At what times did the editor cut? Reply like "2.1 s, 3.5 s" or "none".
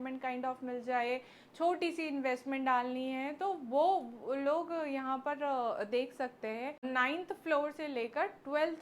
6.8 s